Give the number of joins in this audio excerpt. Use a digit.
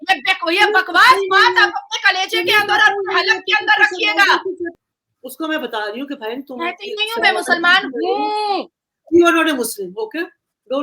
1